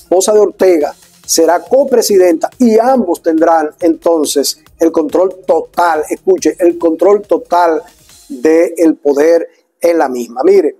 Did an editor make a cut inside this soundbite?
no; 0 cuts

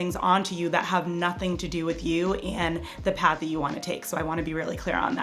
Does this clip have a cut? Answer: no; 0 cuts

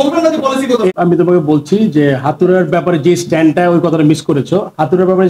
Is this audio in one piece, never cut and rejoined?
no; 1 cut; at 0.9 s

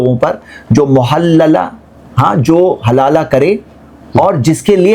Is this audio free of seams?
yes; 0 cuts

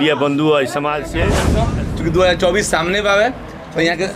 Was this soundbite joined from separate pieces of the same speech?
yes; 1 cut; at 1.6 s

